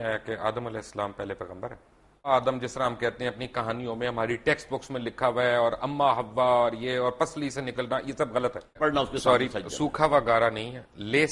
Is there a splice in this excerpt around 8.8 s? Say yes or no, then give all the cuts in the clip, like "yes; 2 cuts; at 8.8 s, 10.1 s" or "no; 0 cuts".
yes; 2 cuts; at 2.3 s, 8.8 s